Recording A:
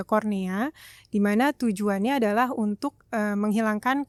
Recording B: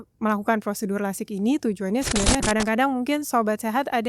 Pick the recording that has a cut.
B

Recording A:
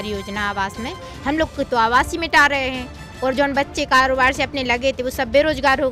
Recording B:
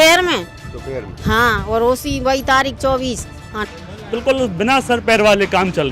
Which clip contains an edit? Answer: B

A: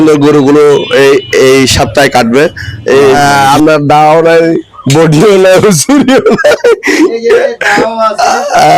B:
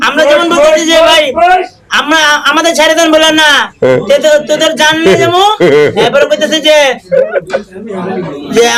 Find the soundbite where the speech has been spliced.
A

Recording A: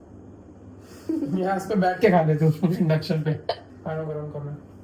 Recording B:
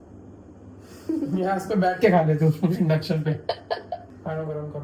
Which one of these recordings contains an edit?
A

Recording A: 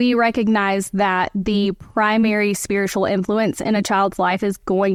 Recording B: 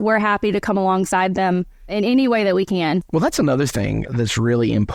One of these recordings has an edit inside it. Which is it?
B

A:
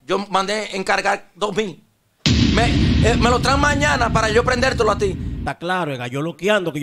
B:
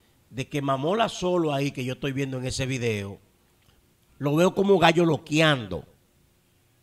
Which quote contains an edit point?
A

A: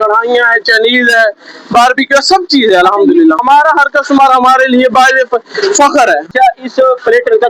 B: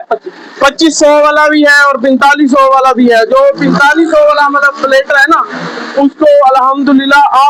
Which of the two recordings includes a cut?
A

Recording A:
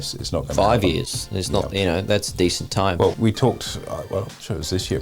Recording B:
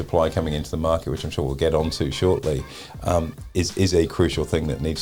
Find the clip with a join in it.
A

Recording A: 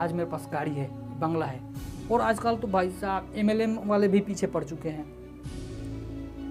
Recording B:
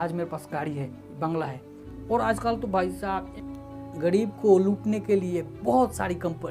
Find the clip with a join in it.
B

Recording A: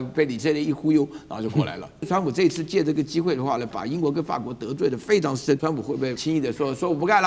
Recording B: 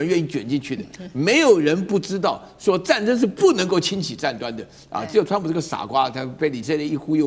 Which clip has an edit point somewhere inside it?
A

